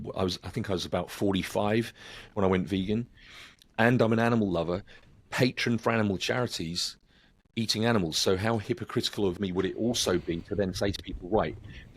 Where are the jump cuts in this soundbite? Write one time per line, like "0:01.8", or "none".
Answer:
0:09.3